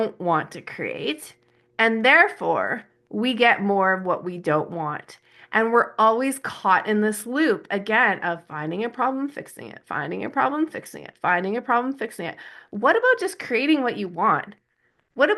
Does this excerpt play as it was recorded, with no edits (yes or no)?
yes